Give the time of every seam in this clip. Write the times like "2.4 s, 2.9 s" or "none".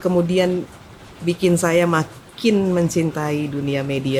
none

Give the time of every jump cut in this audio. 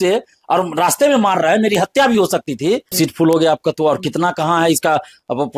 2.9 s

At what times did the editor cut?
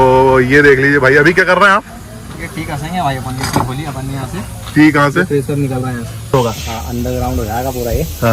6.3 s

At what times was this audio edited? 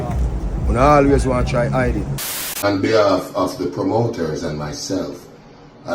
2.6 s

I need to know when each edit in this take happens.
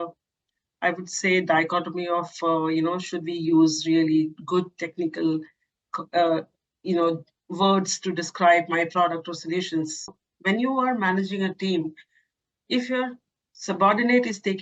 10.2 s

